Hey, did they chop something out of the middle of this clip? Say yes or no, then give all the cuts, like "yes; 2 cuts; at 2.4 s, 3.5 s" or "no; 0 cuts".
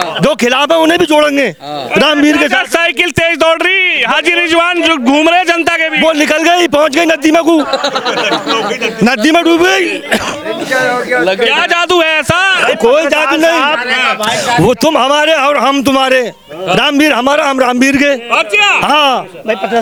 no; 0 cuts